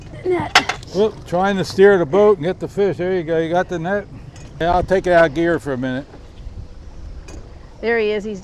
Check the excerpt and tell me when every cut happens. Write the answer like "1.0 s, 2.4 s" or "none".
4.6 s